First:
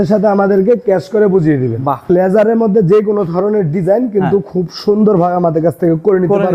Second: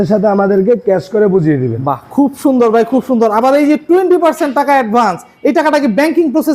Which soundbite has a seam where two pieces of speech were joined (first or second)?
first